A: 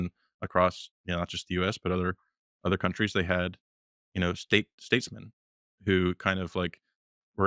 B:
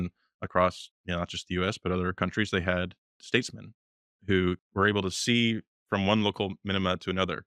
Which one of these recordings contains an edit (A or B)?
B